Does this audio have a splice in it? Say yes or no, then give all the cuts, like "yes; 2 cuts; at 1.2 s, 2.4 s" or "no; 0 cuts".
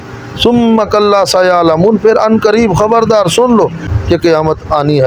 yes; 1 cut; at 3.9 s